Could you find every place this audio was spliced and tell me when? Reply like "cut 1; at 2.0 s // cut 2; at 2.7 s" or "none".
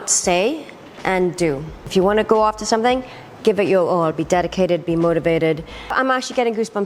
cut 1; at 1.9 s // cut 2; at 5.9 s